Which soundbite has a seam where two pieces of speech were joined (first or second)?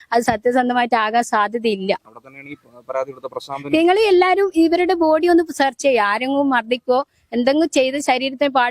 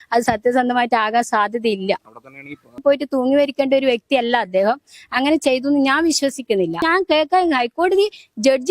second